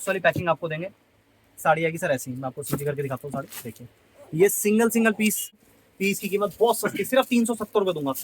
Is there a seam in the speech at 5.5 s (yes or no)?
yes